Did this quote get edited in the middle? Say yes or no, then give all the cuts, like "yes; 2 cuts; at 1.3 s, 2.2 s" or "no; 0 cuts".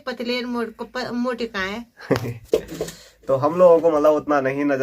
no; 0 cuts